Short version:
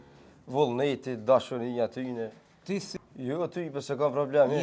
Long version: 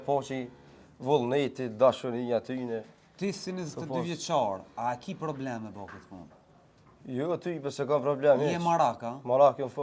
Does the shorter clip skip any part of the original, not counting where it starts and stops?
yes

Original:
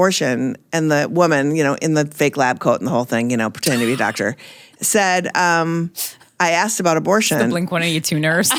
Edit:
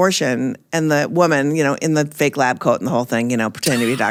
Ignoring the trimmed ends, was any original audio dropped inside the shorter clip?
no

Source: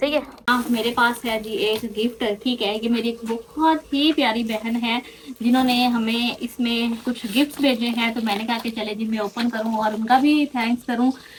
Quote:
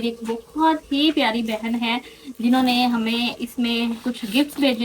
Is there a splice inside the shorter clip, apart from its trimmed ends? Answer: no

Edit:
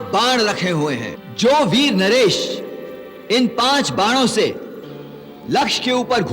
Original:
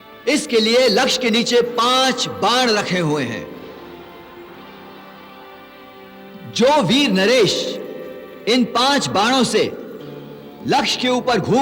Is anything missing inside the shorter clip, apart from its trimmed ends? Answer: yes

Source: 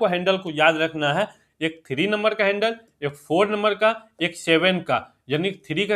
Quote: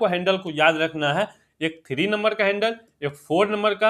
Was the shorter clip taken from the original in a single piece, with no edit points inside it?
yes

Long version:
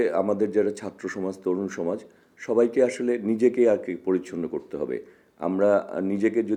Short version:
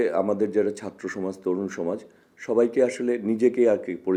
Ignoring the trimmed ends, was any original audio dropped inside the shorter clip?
no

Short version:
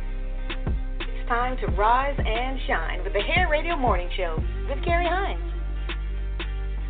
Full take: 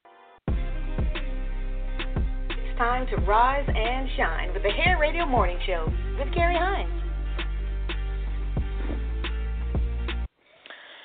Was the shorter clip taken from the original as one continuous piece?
yes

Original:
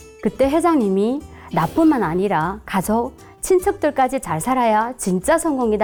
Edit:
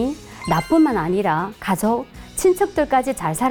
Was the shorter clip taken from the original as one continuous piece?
yes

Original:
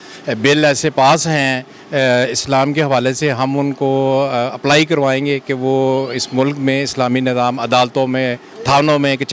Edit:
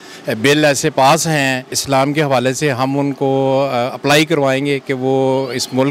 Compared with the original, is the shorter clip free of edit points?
no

